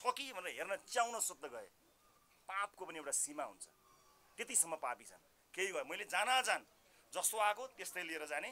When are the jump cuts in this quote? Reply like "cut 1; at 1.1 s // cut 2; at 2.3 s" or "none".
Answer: none